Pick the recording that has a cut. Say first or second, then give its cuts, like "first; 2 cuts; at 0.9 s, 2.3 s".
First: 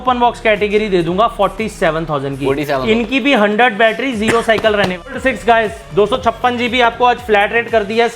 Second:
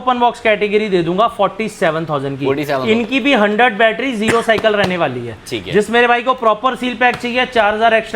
first; 1 cut; at 5.2 s